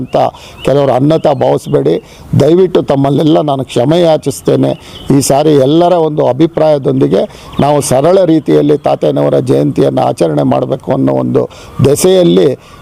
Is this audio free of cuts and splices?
yes; 0 cuts

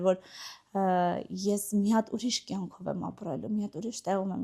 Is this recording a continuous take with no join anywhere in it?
yes; 0 cuts

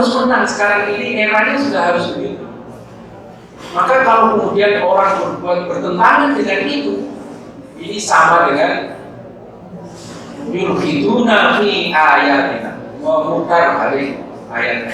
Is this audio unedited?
yes; 0 cuts

